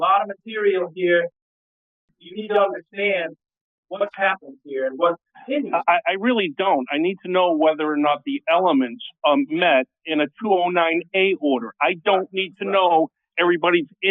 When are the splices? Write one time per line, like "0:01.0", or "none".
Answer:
0:01.8

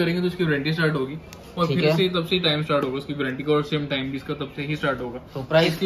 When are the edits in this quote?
none

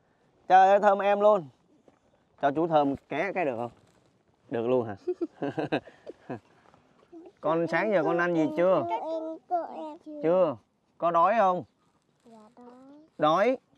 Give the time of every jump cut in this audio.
0:07.1

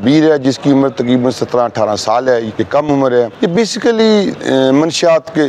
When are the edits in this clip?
0:02.6
0:03.3

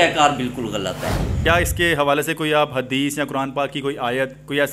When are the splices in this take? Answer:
0:01.4

